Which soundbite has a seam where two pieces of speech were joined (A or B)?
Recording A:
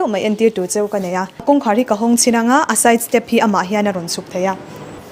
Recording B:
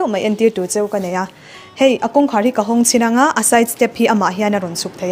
A